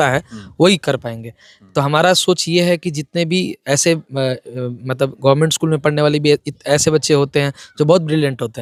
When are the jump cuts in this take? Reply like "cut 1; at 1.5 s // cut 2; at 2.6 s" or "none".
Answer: none

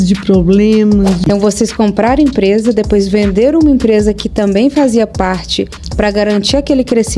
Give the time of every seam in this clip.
cut 1; at 1.2 s

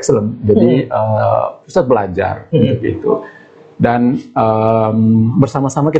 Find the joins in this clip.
none

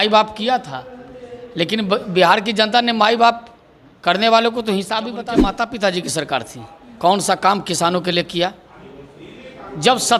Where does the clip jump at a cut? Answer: cut 1; at 5.5 s

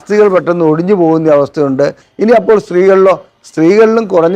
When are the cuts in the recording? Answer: cut 1; at 2.0 s

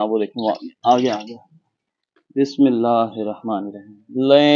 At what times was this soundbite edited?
cut 1; at 2.0 s

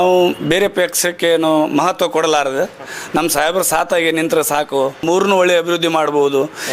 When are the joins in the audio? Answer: cut 1; at 5.0 s

